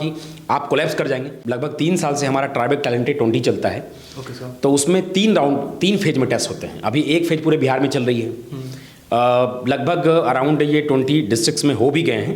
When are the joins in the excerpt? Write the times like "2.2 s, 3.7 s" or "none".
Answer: 1.4 s